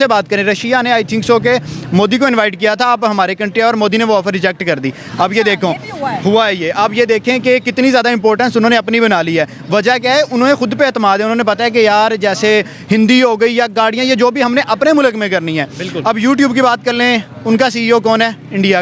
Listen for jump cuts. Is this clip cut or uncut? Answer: uncut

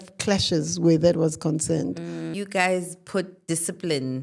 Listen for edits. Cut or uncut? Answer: cut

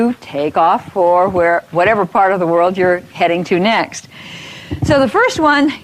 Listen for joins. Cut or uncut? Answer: cut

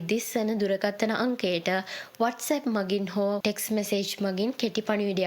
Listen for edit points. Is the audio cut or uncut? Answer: cut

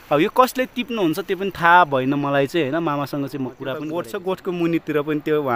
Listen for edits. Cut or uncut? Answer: cut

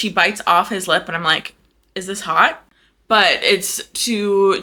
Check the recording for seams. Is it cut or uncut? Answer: uncut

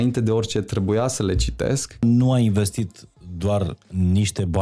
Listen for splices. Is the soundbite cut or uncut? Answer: cut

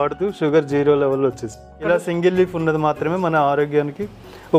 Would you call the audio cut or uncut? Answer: cut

